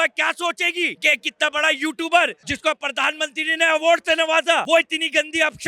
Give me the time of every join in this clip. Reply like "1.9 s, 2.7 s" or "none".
1.0 s, 2.5 s, 4.6 s

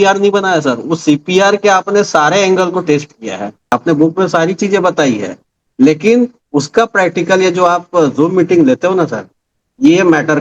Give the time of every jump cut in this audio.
3.7 s

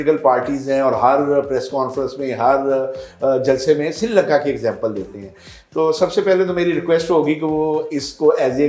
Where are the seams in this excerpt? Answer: none

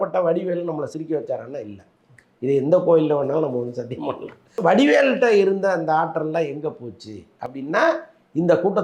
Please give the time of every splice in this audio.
4.6 s

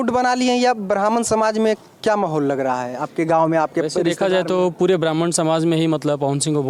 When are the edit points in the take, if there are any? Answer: none

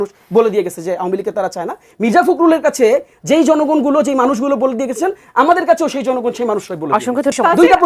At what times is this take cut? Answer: none

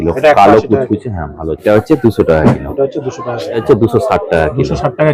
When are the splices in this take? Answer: 1.6 s, 3.6 s

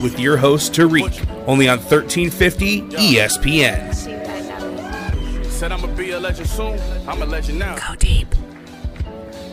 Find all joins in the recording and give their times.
none

